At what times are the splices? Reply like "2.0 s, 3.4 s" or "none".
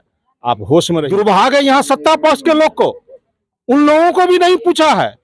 1.0 s

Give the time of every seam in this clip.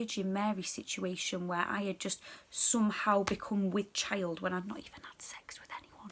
none

